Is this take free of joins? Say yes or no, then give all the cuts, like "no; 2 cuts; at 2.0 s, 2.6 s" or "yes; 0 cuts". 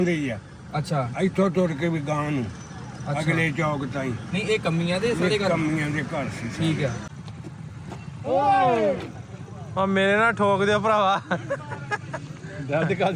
no; 1 cut; at 7.0 s